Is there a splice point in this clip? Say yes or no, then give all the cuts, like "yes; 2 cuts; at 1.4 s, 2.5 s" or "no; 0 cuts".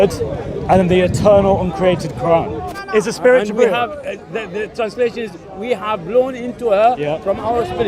yes; 1 cut; at 2.7 s